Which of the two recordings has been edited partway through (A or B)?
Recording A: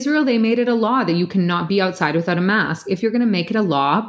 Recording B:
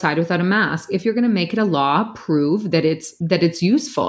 B